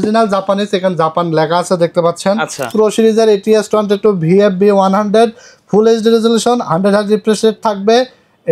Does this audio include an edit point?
yes; 1 cut; at 2.7 s

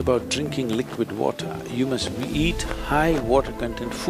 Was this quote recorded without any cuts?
yes; 0 cuts

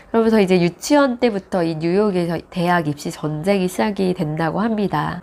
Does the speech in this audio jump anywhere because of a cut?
no; 0 cuts

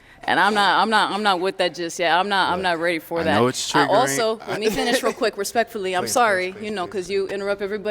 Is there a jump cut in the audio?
yes; 1 cut; at 2.3 s

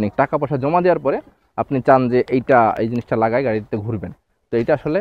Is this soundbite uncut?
yes; 0 cuts

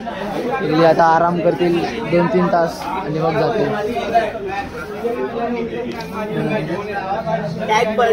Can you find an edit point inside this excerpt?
no; 0 cuts

